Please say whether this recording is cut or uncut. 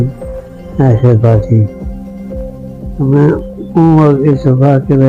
uncut